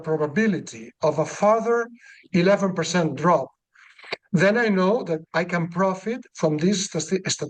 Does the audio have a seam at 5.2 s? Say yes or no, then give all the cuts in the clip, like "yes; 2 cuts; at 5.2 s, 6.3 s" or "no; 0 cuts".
no; 0 cuts